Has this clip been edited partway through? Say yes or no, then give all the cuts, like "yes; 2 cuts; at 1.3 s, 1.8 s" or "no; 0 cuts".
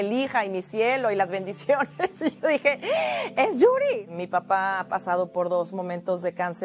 yes; 1 cut; at 4.0 s